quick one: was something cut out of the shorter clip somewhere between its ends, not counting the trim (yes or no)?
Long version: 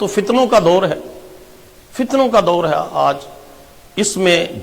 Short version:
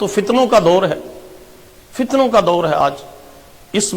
yes